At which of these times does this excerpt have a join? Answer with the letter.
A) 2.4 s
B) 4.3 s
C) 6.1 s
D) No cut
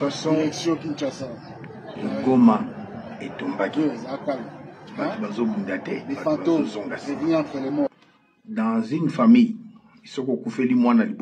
D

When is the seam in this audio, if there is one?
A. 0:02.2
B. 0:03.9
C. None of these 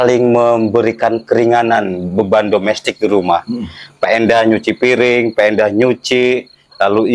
C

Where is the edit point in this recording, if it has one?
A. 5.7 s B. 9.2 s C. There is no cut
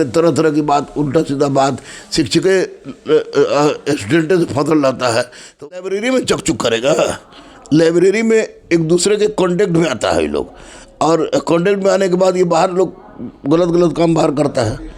A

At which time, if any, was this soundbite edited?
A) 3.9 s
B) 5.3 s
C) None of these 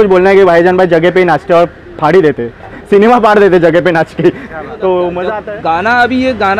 B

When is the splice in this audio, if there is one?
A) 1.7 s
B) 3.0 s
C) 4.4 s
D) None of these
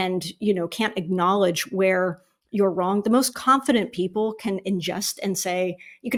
D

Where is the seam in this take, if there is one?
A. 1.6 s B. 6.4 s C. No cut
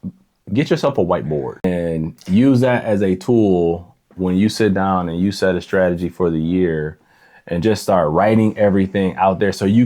A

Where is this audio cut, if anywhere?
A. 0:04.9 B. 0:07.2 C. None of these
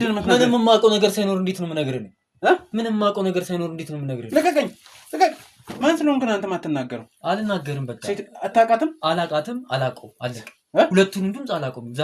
C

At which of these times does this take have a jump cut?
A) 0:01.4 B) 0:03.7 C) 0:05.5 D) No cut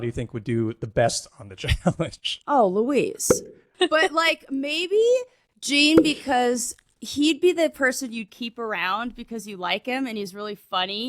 B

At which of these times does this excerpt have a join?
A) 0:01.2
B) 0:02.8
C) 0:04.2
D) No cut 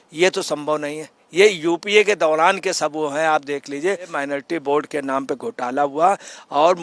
C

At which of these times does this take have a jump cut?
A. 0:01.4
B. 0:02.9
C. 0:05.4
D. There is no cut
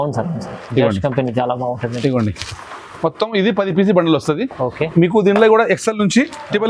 D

